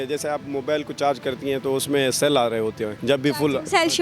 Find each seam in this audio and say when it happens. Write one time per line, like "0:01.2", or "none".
0:02.9